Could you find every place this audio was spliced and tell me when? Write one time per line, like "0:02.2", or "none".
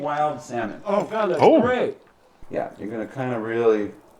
0:02.4